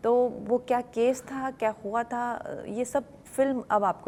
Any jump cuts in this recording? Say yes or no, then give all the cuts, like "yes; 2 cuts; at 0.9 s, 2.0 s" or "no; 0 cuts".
no; 0 cuts